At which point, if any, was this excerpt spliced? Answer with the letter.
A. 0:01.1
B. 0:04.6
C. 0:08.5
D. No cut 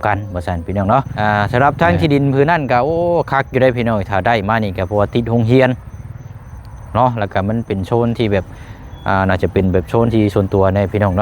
A